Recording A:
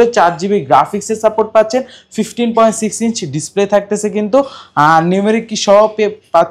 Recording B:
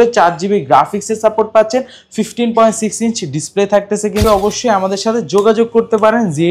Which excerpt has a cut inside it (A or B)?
B